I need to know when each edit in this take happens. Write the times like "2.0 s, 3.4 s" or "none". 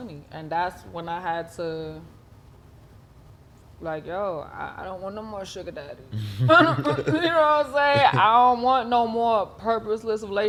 none